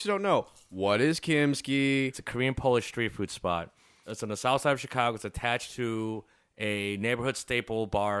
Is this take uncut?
no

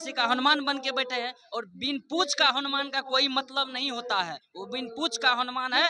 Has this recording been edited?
no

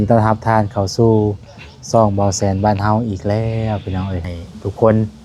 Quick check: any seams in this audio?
yes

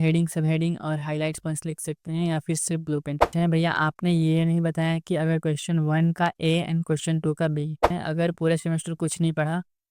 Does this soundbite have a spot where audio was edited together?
yes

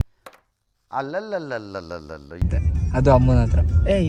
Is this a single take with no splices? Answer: yes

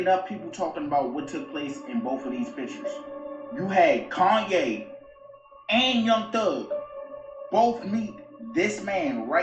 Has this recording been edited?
no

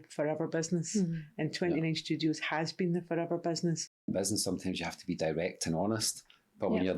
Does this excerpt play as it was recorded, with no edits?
no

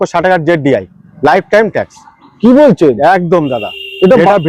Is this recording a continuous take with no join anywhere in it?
yes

